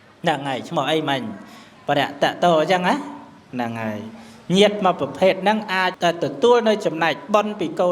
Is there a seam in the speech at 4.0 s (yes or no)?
no